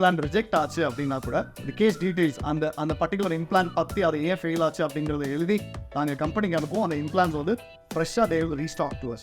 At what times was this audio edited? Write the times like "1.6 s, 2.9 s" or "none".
1.6 s